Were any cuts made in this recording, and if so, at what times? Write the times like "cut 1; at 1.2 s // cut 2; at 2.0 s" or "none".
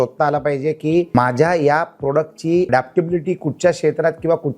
cut 1; at 1.1 s // cut 2; at 2.7 s